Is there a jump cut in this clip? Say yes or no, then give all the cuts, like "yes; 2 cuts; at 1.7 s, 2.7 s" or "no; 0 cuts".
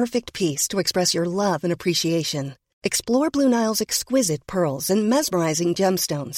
no; 0 cuts